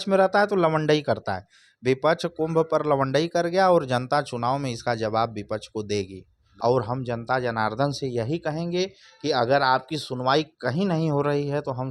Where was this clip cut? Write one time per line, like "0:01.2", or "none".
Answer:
0:06.4